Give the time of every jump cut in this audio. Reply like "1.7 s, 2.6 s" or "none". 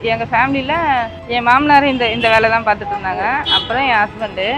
1.2 s